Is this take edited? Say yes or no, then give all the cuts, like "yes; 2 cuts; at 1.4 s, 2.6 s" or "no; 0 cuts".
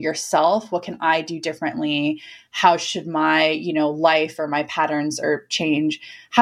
no; 0 cuts